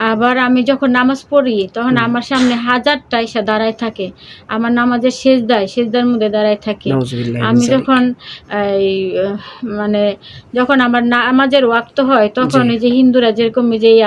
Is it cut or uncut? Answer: uncut